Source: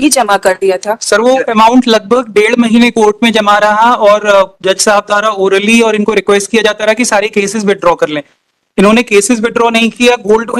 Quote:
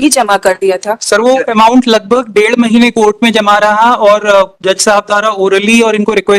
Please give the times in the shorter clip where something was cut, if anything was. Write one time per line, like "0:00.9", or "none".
none

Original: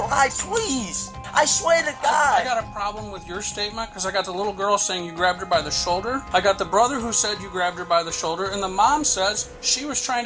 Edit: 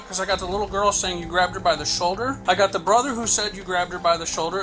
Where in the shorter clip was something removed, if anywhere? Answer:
none

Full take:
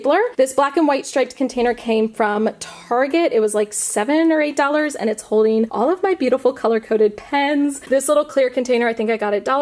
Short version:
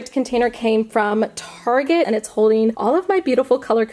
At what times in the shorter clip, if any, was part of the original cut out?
0:02.1

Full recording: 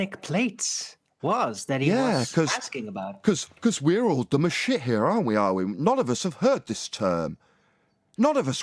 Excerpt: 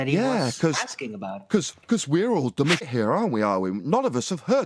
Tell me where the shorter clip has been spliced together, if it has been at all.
0:02.9

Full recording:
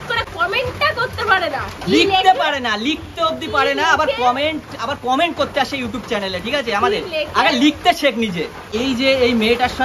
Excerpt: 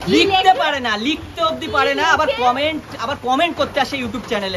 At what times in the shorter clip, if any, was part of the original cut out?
none

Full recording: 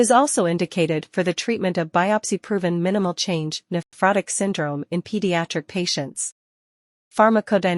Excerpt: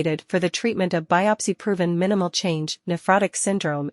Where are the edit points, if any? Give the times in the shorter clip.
0:03.0

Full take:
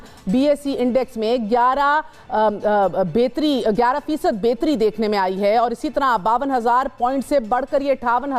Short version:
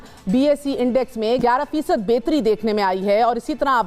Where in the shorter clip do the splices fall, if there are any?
0:01.4

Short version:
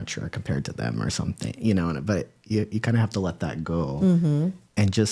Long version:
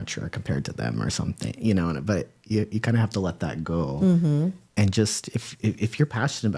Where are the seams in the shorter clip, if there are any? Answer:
none

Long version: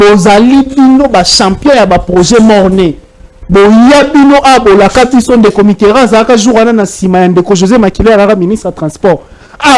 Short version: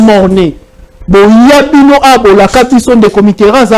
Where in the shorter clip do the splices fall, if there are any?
none

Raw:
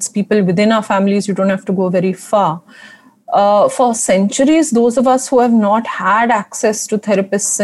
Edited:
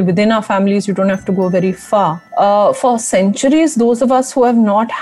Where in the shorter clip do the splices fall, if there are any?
0:02.2

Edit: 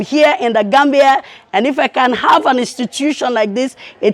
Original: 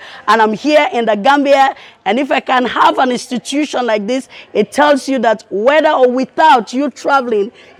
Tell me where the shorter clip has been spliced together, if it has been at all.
none

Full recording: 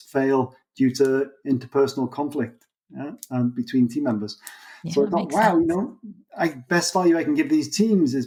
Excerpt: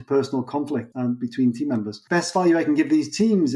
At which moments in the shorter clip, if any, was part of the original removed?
0:00.9
0:02.0

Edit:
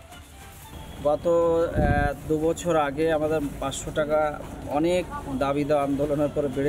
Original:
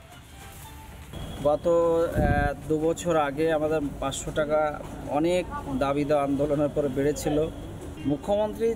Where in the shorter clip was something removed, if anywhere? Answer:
0:00.9

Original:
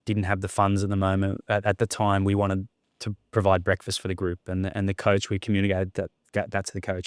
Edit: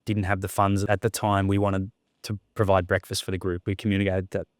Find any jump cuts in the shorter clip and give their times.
0:00.9
0:03.6

